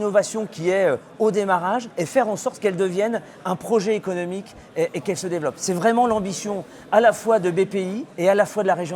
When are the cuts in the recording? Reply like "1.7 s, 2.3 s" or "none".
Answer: 1.9 s, 8.0 s